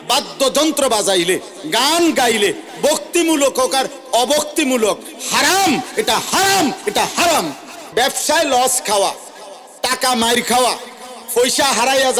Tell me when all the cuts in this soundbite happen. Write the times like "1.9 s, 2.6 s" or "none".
7.8 s